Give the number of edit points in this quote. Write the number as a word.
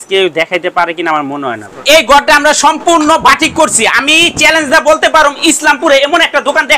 one